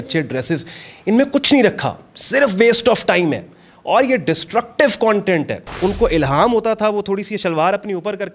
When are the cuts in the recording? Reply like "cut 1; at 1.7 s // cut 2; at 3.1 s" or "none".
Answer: cut 1; at 5.6 s